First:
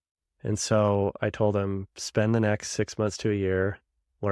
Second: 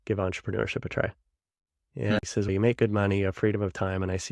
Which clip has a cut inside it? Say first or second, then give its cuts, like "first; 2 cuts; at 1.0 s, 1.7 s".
second; 1 cut; at 2.2 s